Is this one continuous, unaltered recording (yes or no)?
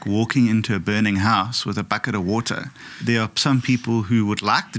no